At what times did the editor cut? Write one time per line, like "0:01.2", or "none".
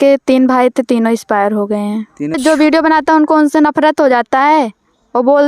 0:02.4